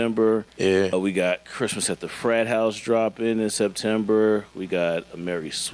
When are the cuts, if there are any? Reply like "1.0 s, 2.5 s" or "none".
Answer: 0.9 s